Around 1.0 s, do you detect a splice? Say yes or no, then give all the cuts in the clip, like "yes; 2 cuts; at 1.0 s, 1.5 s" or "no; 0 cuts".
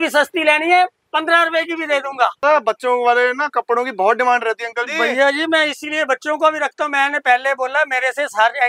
no; 1 cut; at 2.4 s